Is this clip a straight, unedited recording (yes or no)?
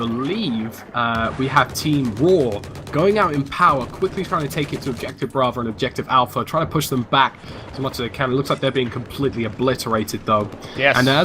no